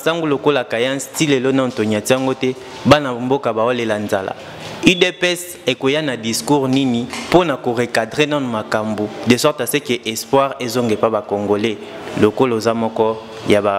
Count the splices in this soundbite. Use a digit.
0